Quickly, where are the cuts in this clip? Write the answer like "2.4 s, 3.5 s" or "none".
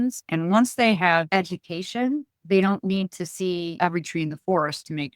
1.3 s, 3.8 s